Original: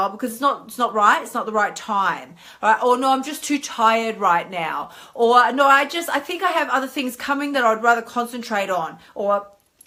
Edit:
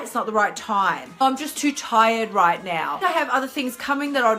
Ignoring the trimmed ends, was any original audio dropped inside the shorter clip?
yes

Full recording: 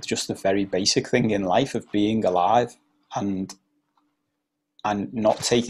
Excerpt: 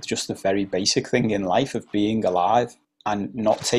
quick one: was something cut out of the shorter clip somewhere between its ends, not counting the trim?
yes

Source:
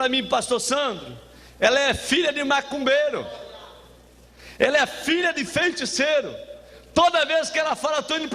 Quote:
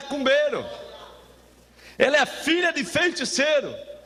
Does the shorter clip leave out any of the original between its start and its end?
no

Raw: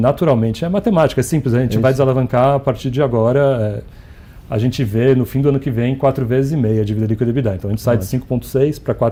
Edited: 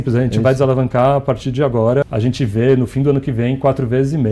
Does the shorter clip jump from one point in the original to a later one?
yes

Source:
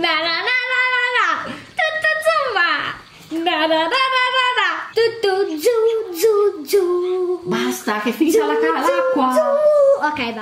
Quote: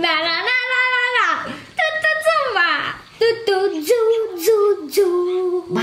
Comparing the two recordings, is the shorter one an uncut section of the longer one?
no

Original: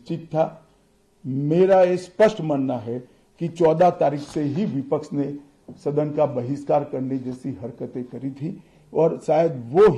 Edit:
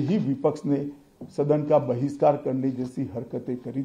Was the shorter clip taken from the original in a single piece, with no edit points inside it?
yes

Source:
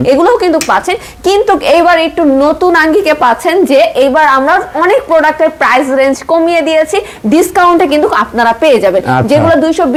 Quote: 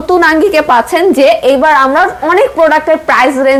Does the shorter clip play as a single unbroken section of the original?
yes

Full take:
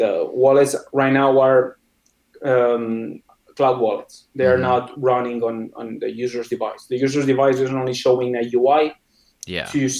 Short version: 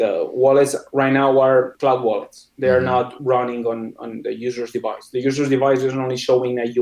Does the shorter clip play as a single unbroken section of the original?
no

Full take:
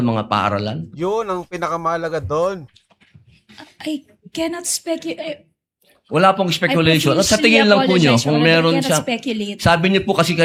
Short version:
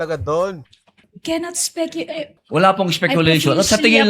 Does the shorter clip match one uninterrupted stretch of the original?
no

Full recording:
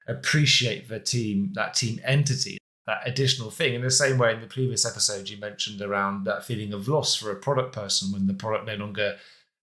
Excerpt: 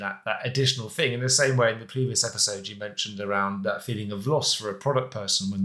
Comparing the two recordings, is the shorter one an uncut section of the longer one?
yes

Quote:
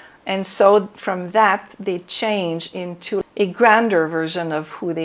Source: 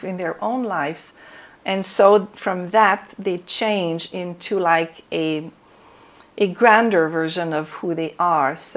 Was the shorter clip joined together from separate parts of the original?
yes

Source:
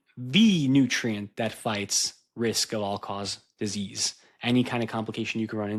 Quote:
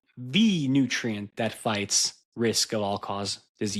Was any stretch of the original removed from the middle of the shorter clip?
no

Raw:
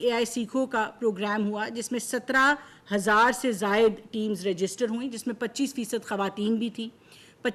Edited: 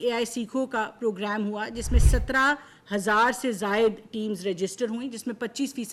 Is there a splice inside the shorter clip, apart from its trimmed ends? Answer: no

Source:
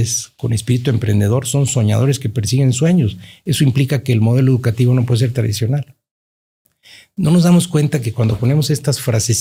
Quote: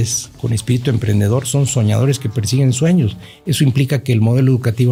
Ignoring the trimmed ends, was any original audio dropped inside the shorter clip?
no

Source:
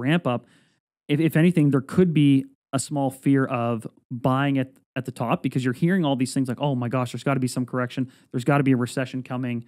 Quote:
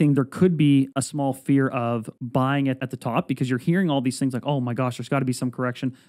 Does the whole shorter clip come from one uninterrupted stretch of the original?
no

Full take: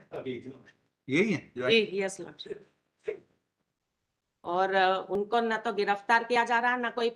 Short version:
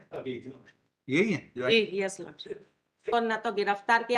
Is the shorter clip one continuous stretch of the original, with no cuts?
no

